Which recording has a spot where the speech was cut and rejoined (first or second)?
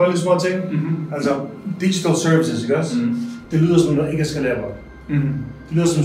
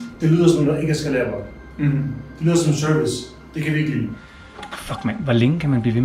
second